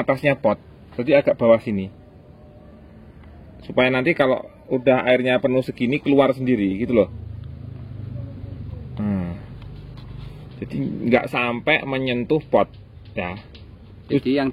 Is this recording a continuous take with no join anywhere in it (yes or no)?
yes